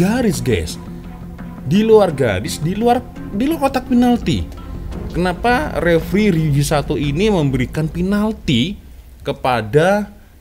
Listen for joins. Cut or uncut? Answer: uncut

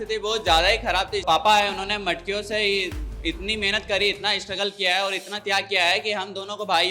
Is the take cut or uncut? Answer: cut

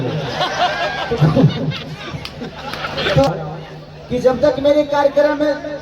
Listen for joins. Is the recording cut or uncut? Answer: cut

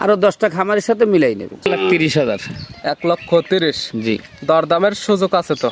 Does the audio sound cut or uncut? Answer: cut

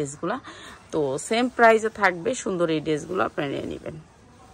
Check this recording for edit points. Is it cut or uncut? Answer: uncut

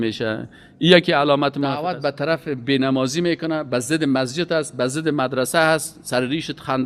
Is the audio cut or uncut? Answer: cut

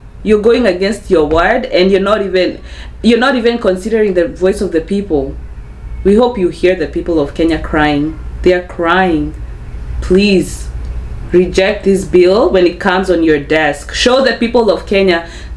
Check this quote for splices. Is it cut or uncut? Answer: uncut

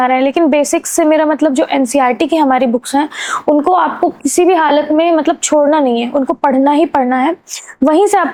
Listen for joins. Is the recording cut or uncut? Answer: uncut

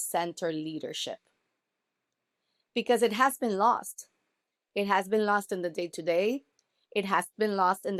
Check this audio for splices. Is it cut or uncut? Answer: uncut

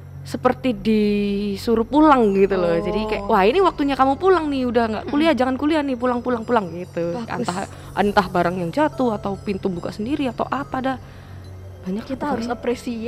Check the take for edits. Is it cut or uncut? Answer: uncut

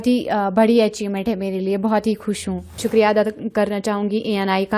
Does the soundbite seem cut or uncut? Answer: cut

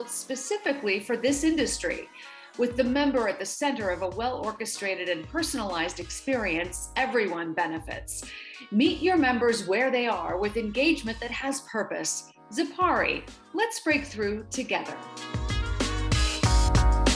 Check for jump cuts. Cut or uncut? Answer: cut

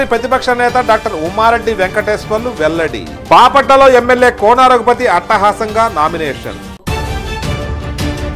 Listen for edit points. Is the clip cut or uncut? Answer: uncut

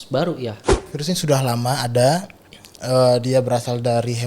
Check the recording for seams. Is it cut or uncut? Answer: cut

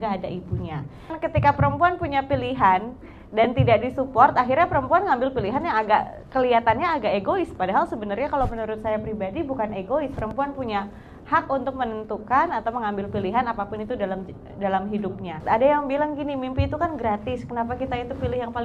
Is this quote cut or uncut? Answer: cut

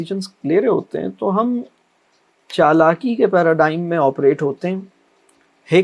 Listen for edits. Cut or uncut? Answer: uncut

